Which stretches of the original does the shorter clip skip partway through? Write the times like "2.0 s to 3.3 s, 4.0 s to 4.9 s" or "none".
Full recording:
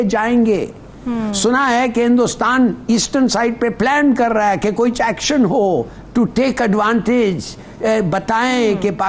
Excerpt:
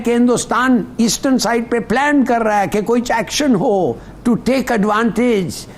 none